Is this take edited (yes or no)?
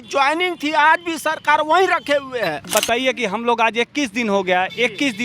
yes